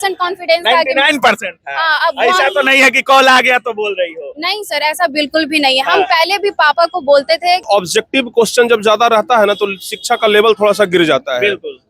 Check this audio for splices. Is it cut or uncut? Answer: cut